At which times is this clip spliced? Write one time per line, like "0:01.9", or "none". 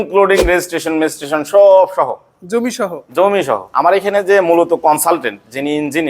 0:03.7